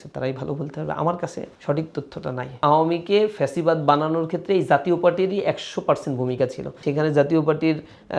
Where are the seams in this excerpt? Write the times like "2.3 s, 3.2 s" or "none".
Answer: 1.5 s, 2.6 s, 6.8 s